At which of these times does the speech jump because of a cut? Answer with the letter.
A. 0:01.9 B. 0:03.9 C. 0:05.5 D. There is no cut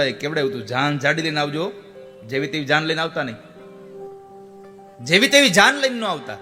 B